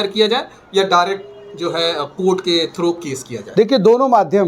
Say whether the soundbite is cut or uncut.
uncut